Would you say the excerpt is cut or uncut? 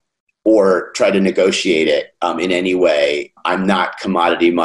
cut